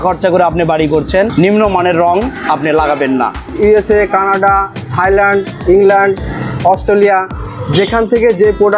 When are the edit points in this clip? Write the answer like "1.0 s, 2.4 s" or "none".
1.3 s, 3.4 s